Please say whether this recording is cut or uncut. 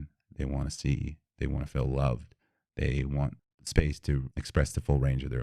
cut